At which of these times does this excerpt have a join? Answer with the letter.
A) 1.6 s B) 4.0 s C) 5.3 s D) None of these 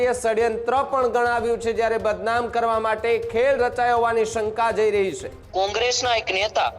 C